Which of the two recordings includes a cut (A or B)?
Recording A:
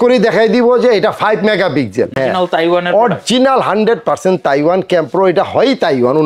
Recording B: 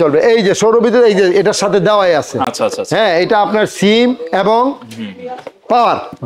A